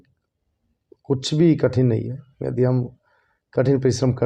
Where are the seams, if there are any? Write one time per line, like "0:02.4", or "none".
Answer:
none

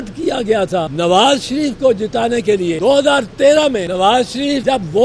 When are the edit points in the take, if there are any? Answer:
0:00.9
0:02.8
0:04.1

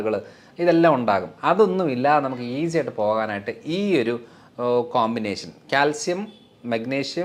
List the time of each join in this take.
none

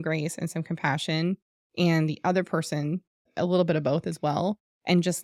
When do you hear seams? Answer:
none

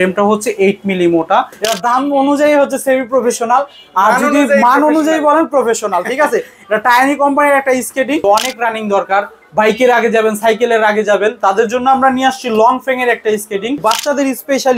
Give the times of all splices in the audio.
0:01.6
0:08.2
0:13.8

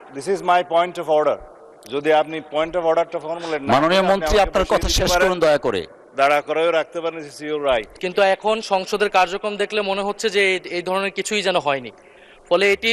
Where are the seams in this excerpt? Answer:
0:08.0

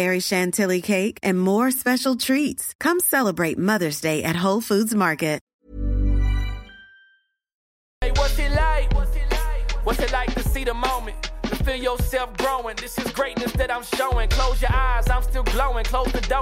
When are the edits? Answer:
0:05.5
0:07.8

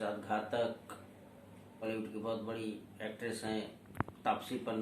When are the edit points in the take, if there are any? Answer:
0:01.8

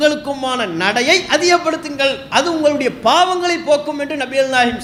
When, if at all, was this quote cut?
none

